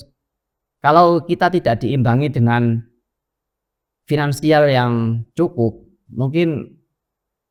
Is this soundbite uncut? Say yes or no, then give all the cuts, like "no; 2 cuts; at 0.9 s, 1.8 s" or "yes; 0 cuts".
yes; 0 cuts